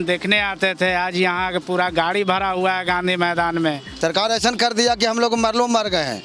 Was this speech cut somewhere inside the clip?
yes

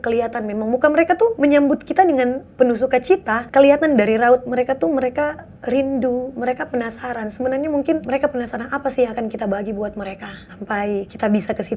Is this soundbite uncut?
no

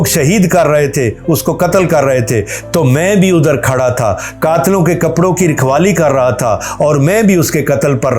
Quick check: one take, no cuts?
yes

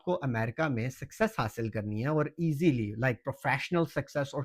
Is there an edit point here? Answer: no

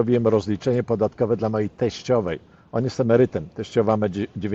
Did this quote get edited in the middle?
no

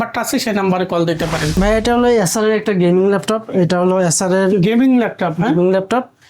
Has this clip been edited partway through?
yes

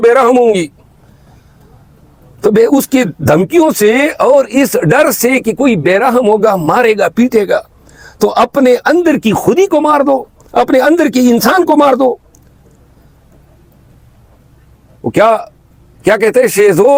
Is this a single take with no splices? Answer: yes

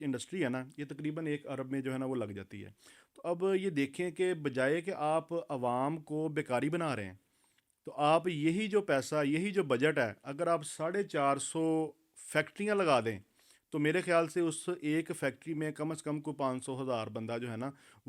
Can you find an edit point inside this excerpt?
no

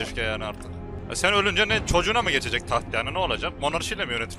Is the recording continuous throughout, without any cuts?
no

